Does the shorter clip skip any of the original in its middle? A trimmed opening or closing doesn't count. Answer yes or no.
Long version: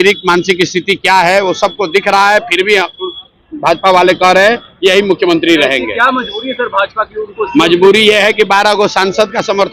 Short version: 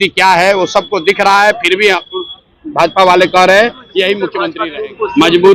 yes